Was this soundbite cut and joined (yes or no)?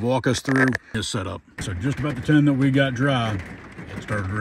yes